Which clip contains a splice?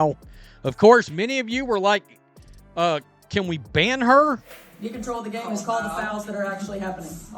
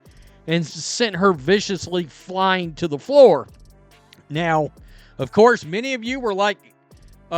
first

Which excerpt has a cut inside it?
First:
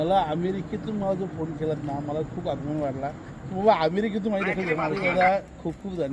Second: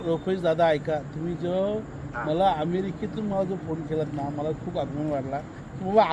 first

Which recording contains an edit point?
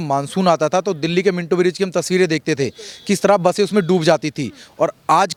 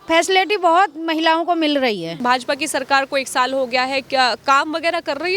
second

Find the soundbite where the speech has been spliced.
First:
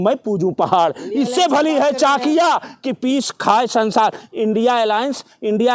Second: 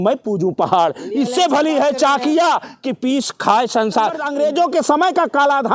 second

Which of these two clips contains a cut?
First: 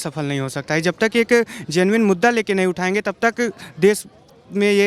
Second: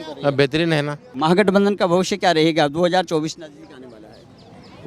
second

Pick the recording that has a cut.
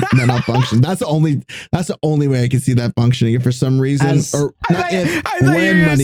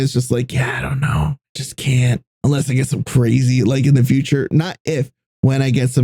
second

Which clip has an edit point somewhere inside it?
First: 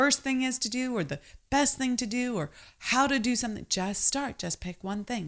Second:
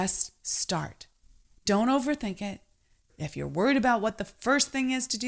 second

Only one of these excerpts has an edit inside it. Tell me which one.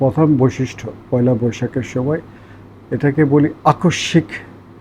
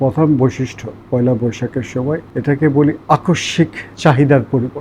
second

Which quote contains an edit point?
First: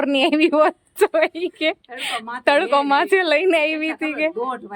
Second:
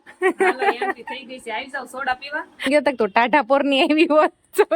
second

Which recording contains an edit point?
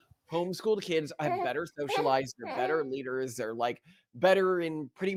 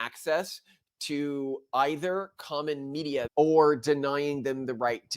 second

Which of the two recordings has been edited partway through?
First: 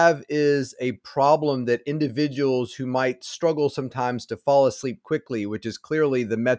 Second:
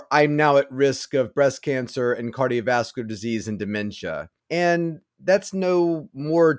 second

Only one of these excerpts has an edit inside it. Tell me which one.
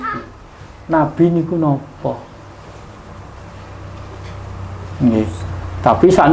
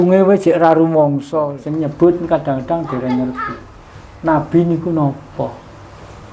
second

